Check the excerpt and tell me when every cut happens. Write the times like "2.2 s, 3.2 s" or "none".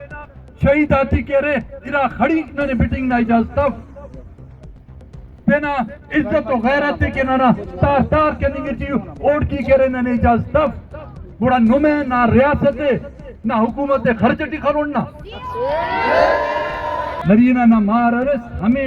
16.9 s